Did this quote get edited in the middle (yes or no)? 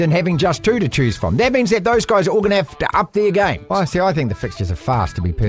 yes